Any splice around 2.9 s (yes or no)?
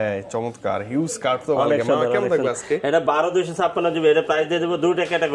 no